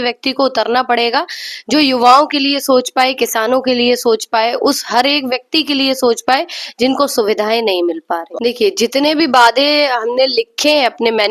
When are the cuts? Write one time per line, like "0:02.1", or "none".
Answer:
0:08.3